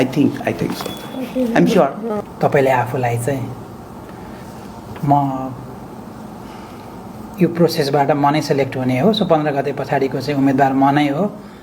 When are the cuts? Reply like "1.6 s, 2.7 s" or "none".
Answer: 2.2 s